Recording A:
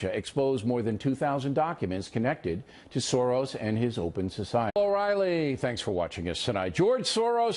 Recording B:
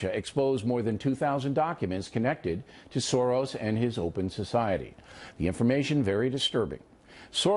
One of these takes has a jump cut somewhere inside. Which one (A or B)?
B